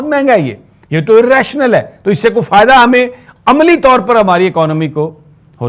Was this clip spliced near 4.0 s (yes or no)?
no